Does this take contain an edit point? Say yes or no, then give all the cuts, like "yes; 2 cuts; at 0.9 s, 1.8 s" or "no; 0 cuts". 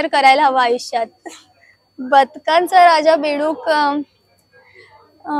no; 0 cuts